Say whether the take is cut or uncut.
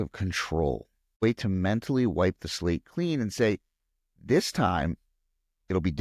cut